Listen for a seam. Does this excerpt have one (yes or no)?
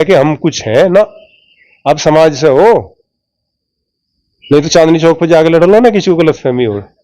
no